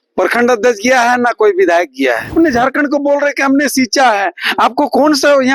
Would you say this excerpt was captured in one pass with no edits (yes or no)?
no